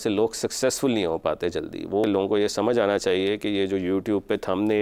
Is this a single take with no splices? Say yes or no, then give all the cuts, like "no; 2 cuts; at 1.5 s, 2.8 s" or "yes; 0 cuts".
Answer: no; 1 cut; at 2.0 s